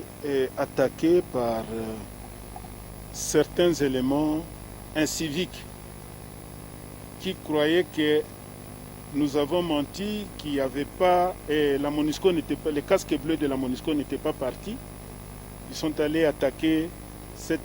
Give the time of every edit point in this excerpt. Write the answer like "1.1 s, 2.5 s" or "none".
5.5 s, 7.2 s